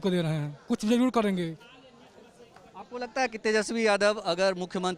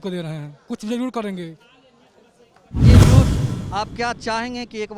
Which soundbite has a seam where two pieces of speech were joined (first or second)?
second